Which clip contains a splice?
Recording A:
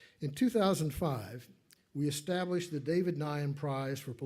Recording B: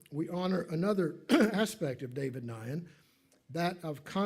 A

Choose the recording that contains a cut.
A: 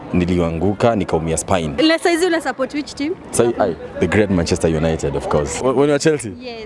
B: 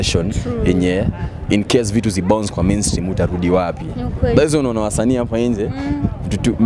A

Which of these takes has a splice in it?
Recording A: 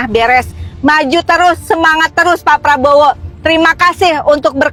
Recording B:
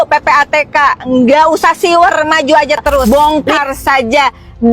B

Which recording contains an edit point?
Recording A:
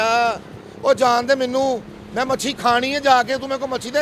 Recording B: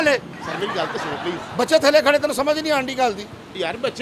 B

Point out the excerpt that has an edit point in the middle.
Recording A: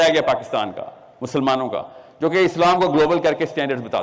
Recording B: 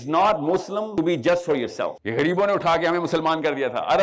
B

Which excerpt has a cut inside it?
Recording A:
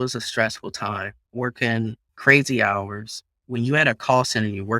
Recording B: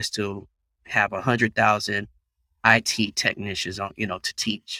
A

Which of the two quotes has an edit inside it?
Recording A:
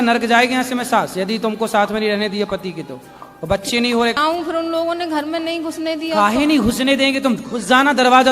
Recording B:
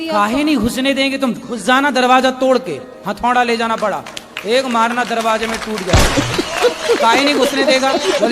A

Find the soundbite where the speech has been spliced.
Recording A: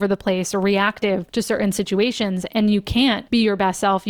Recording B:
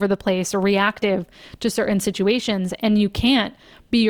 A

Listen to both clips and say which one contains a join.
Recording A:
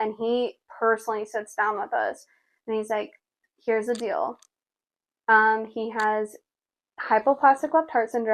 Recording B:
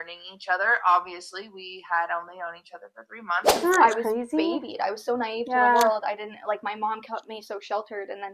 B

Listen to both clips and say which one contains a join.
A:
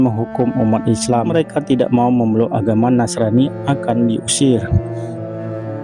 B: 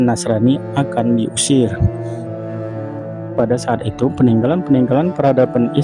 A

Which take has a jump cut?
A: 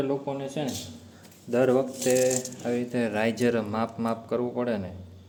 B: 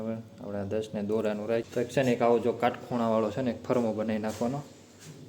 B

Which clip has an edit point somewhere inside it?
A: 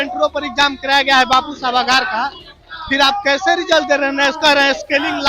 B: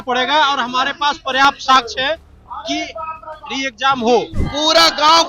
B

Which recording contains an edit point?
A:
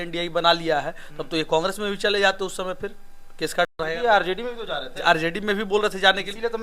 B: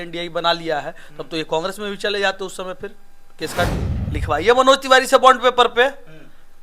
B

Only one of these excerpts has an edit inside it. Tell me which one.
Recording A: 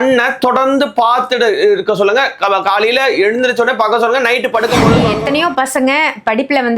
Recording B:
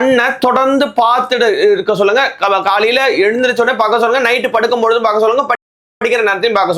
A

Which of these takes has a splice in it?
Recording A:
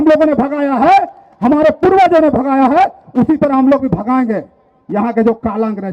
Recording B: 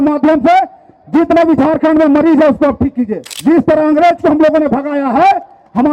B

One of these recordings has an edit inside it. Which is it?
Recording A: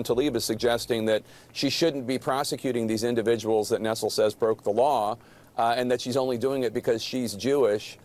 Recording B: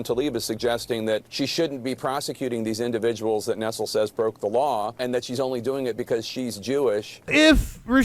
B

